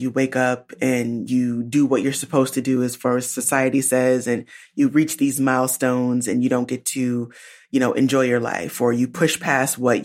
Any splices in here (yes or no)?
no